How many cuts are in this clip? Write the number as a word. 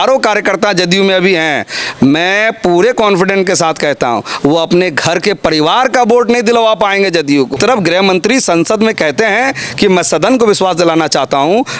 one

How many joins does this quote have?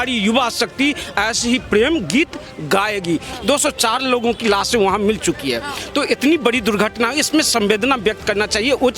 one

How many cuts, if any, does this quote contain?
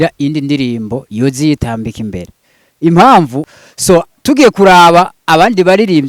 one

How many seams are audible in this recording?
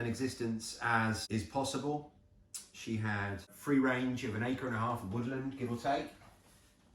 two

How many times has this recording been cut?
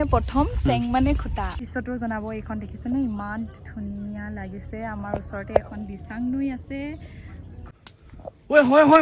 two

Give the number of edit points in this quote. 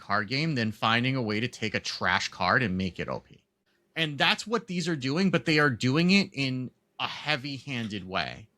one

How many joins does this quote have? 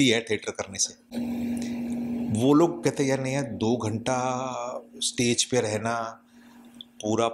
zero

